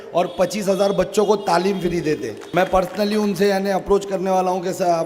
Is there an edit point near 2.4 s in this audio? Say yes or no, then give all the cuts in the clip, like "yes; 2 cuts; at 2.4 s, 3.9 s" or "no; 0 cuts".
yes; 1 cut; at 2.4 s